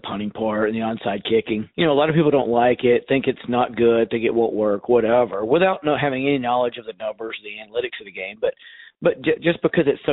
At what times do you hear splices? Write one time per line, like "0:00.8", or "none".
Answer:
0:01.7